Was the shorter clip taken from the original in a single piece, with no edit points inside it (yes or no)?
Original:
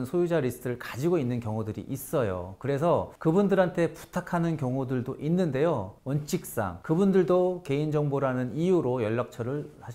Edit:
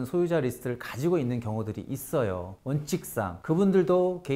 no